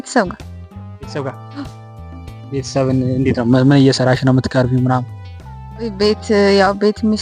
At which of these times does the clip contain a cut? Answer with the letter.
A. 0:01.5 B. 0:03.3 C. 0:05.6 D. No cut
D